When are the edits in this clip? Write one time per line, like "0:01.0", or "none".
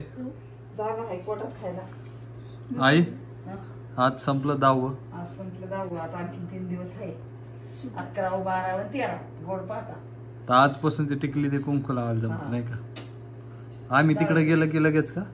none